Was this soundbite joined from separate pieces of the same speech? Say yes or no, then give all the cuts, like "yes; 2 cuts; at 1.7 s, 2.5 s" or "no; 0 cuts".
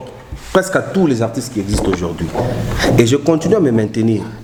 no; 0 cuts